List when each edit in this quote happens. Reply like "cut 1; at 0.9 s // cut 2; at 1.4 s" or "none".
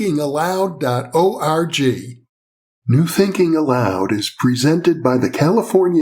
cut 1; at 2.8 s